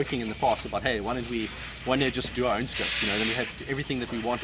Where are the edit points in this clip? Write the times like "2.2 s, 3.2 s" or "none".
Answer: none